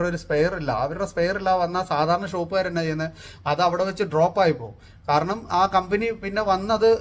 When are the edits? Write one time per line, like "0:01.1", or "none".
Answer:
none